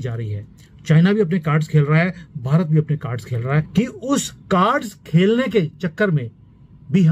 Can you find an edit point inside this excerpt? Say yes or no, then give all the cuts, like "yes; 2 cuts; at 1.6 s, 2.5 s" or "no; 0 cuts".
yes; 1 cut; at 3.7 s